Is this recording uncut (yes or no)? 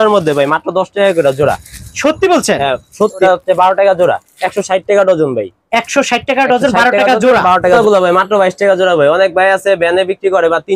no